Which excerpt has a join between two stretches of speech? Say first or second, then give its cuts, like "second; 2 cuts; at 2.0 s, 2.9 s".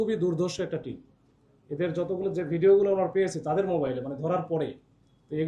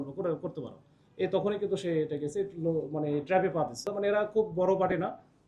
second; 1 cut; at 3.9 s